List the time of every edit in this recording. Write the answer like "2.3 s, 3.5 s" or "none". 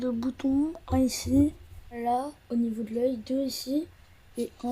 2.0 s